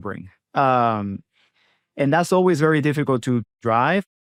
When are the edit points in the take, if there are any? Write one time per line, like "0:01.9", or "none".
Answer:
none